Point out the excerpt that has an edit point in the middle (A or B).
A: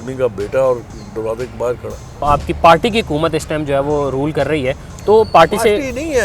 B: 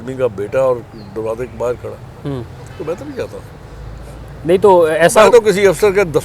A